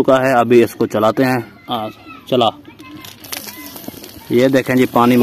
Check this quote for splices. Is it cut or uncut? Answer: uncut